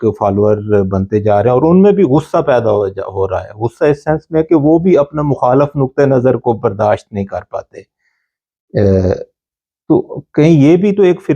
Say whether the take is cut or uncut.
uncut